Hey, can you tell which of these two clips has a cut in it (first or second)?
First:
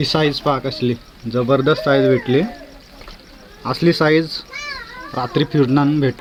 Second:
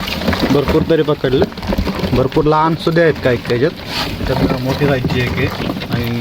second